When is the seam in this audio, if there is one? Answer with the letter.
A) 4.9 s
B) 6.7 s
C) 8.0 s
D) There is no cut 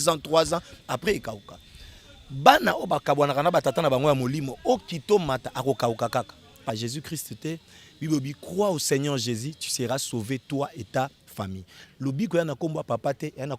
B